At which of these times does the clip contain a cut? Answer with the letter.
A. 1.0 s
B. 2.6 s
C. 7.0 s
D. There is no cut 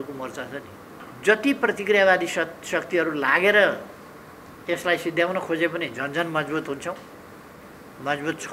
A